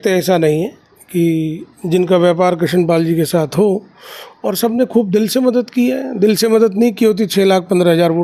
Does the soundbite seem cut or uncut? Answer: uncut